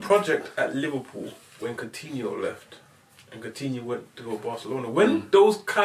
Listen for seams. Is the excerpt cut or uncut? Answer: uncut